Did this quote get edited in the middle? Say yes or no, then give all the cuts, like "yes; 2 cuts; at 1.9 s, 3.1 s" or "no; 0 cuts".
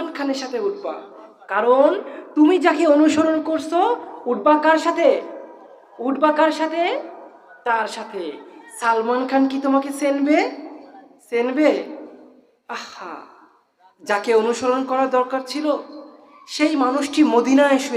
no; 0 cuts